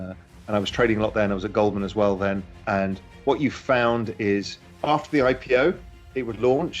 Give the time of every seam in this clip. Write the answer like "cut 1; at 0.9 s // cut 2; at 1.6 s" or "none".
cut 1; at 2.5 s